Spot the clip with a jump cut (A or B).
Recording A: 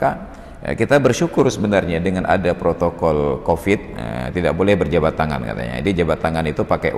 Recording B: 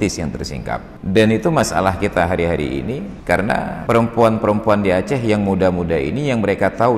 B